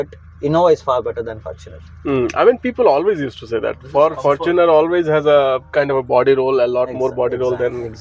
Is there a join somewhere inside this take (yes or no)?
no